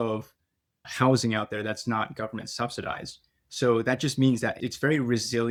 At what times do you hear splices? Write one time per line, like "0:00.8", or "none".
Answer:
none